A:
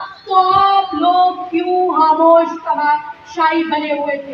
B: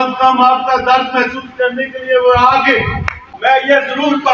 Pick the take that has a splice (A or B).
B